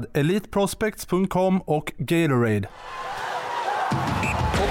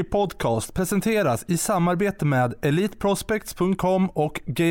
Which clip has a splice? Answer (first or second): first